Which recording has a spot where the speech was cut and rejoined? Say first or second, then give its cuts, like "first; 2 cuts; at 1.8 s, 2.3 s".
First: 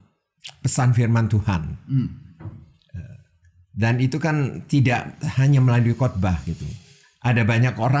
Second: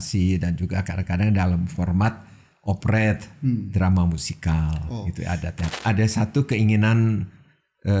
second; 1 cut; at 5.6 s